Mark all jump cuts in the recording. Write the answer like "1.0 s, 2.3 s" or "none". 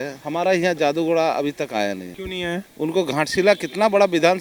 none